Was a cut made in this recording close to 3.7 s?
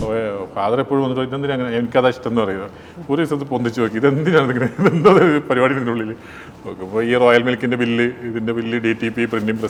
no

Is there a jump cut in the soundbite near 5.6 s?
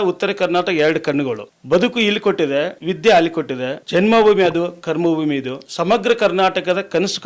yes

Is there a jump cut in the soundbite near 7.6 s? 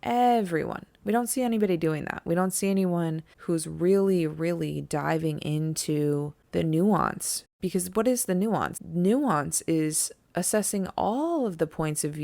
yes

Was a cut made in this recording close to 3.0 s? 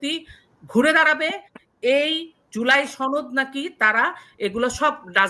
no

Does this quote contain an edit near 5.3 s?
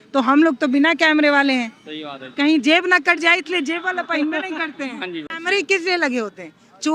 yes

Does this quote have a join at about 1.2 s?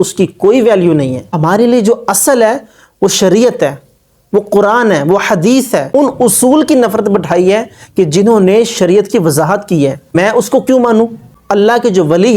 yes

